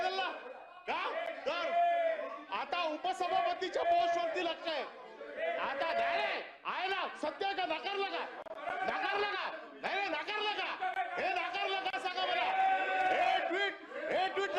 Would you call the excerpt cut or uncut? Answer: uncut